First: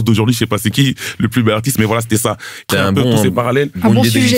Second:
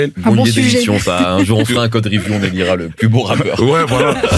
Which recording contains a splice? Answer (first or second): first